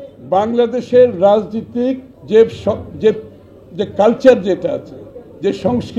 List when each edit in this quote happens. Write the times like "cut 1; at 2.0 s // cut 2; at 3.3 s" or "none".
cut 1; at 2.1 s

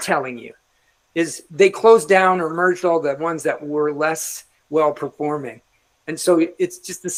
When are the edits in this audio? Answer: none

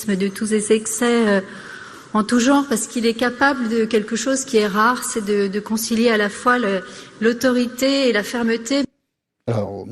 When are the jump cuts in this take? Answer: cut 1; at 5.6 s

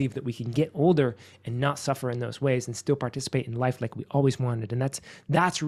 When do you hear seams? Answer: none

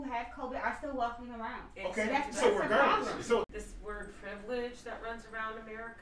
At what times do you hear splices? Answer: cut 1; at 3.5 s

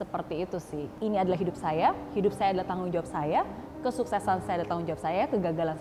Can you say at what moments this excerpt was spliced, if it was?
cut 1; at 0.9 s

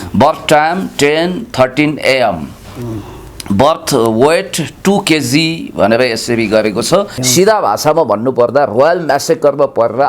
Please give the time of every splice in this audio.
cut 1; at 7.2 s

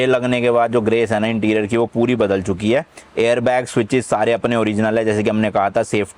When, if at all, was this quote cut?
none

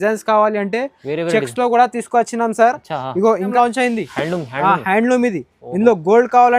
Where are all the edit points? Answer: cut 1; at 3.5 s

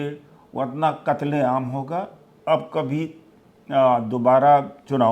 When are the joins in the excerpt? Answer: cut 1; at 2.2 s

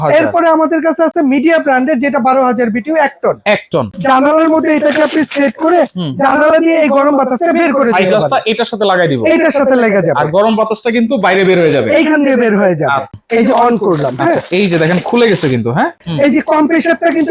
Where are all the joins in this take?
cut 1; at 3.9 s // cut 2; at 13.2 s // cut 3; at 16.0 s

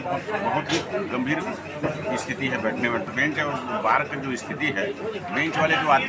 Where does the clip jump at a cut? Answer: cut 1; at 3.1 s

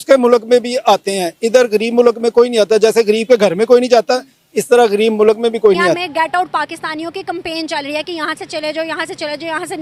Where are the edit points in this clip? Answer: cut 1; at 6.0 s

